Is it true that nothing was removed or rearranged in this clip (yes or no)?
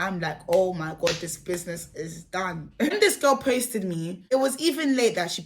no